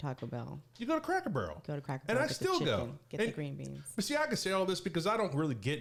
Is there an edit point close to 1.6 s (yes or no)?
no